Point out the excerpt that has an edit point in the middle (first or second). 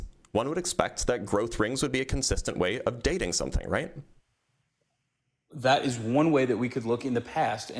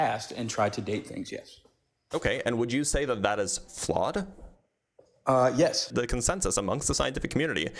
second